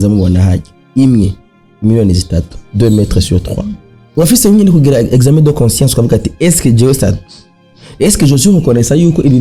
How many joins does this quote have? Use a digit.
1